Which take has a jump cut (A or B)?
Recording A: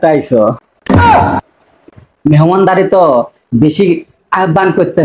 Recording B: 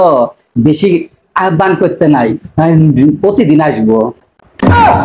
A